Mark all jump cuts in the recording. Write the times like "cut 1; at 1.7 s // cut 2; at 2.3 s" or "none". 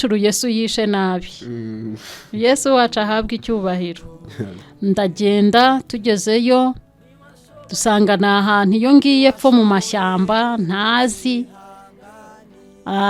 cut 1; at 4.6 s